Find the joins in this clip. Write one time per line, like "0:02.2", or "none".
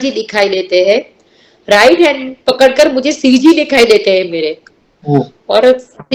none

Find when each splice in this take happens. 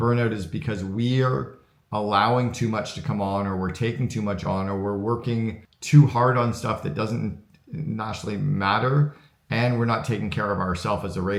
none

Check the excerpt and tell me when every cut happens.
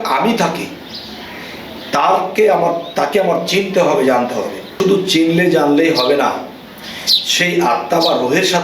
0:04.7

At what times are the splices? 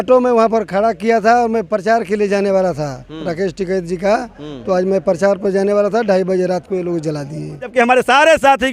0:07.7

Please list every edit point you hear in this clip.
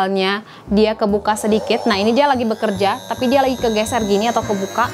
none

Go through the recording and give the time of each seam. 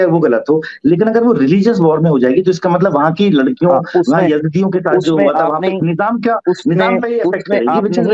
none

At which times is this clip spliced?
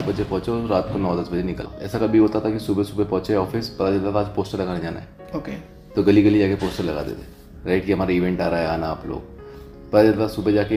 0:01.7

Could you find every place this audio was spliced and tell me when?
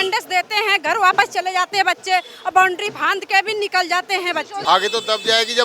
0:04.5

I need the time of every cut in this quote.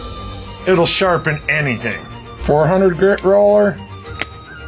0:02.9

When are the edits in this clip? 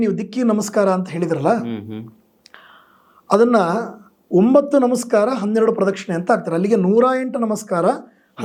none

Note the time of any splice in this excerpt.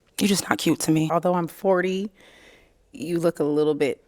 0:01.1

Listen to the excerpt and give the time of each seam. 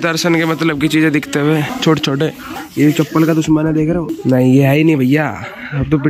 0:01.7
0:02.5
0:04.1

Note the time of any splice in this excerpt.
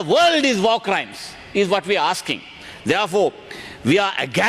none

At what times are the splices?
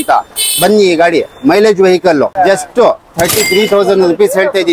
0:02.3

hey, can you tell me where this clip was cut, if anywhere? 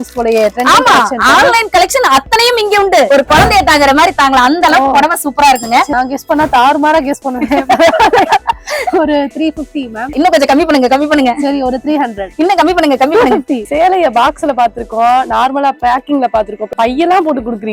0:03.1
0:05.9
0:10.1
0:12.2
0:13.6
0:16.7

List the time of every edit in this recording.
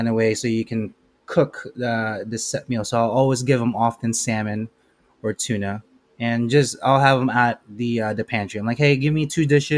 none

